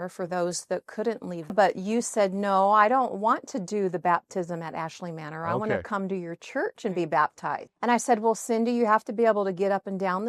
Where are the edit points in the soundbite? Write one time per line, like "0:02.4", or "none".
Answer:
0:01.5
0:07.6